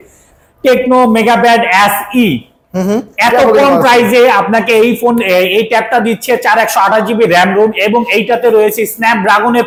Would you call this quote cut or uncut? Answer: uncut